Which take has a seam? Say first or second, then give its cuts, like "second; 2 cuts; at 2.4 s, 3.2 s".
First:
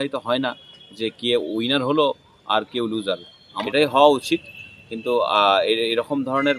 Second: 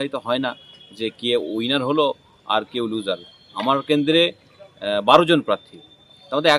first; 1 cut; at 3.6 s